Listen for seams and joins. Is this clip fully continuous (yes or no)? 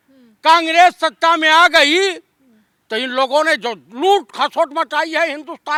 yes